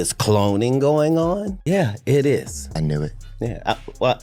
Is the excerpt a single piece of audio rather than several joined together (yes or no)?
no